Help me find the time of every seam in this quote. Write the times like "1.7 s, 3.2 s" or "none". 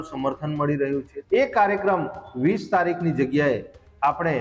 1.1 s